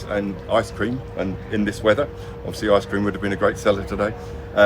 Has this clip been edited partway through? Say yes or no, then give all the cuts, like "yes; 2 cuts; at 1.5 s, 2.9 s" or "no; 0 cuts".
no; 0 cuts